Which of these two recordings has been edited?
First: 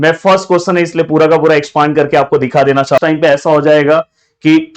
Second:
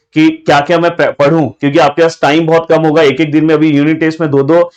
first; 1 cut; at 3.0 s

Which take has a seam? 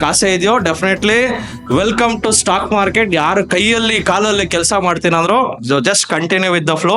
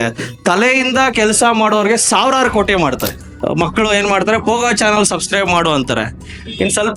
second; 1 cut; at 3.2 s

